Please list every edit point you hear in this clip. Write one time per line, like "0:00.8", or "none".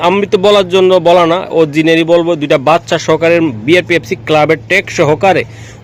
none